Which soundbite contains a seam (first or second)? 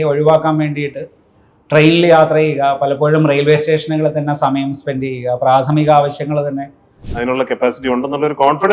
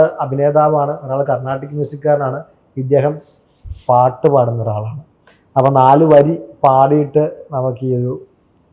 first